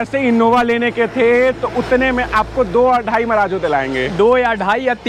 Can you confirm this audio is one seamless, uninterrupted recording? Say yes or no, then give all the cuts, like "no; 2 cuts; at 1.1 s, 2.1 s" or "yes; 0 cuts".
yes; 0 cuts